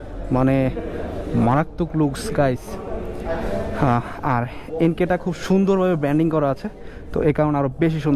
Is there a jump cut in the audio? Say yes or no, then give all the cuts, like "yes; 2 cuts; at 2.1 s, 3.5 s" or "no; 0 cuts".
no; 0 cuts